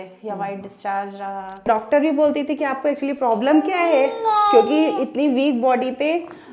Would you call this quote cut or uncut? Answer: cut